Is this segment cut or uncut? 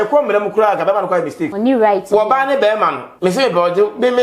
cut